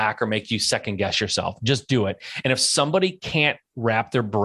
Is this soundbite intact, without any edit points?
yes; 0 cuts

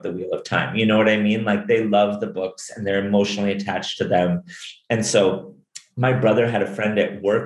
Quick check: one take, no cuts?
yes; 0 cuts

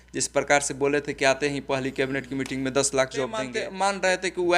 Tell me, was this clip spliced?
yes; 1 cut; at 3.6 s

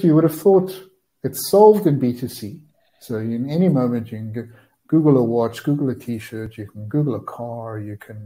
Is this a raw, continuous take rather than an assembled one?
yes; 0 cuts

